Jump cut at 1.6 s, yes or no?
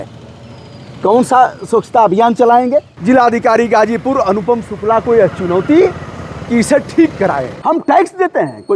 no